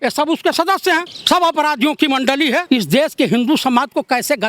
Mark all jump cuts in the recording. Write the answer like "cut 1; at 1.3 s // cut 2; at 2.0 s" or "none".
cut 1; at 1.1 s // cut 2; at 2.6 s